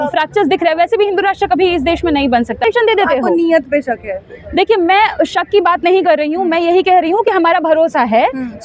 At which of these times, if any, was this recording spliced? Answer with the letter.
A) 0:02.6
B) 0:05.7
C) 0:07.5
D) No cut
A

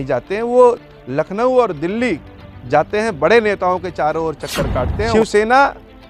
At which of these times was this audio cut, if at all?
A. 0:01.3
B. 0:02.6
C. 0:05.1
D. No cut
C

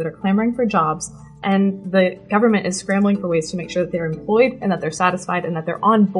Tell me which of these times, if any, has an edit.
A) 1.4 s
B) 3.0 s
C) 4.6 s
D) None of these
A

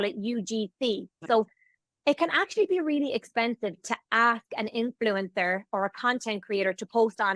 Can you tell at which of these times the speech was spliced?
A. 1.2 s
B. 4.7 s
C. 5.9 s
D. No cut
A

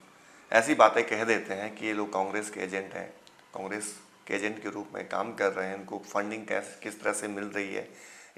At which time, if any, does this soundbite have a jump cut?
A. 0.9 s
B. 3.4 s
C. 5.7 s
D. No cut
D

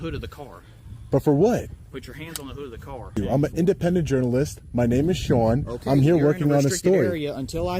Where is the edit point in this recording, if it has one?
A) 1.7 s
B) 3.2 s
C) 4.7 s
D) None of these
B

